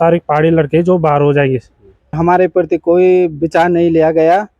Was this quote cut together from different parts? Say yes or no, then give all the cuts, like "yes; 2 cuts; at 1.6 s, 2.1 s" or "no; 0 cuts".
yes; 1 cut; at 2.2 s